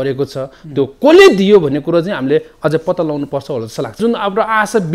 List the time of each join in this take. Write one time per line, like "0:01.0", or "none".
0:04.0